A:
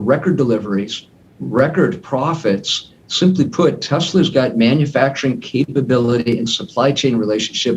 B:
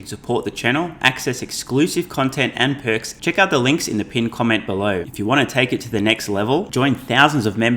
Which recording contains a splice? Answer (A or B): B